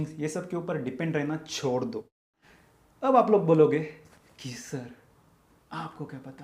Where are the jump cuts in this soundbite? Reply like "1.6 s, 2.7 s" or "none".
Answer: 2.2 s